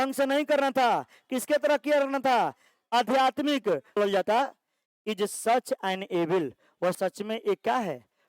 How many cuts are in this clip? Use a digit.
1